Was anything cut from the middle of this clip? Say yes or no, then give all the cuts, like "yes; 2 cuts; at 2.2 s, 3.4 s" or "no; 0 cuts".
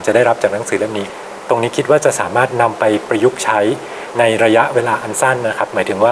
yes; 1 cut; at 1.0 s